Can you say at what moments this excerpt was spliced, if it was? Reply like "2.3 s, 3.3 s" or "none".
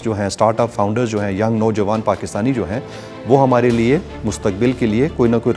none